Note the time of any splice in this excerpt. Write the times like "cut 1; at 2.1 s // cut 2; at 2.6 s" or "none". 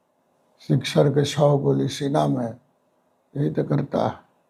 none